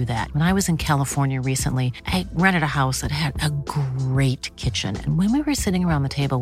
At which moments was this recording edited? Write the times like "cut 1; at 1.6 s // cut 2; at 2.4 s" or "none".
none